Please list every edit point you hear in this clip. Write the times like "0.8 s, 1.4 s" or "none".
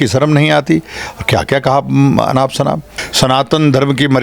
2.9 s